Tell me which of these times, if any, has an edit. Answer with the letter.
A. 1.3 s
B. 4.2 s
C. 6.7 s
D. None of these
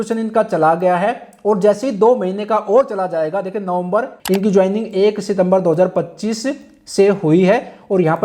B